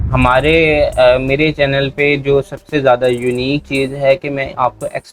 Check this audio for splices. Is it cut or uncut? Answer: uncut